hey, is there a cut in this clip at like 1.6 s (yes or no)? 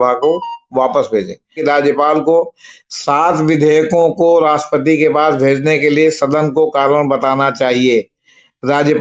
yes